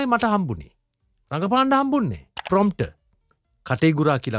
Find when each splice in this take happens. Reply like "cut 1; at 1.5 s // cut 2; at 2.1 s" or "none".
cut 1; at 2.3 s